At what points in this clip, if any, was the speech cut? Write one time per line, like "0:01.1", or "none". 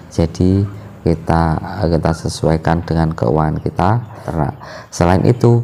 0:04.2